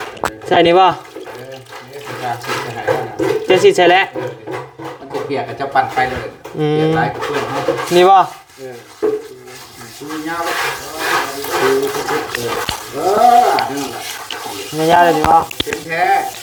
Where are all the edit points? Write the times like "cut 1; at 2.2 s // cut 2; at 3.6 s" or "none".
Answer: none